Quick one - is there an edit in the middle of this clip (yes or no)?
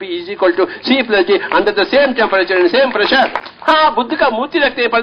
yes